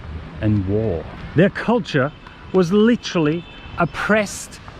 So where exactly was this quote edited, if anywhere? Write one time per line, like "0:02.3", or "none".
0:01.2